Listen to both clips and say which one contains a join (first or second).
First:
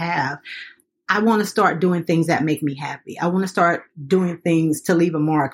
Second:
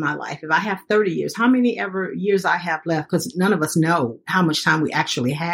second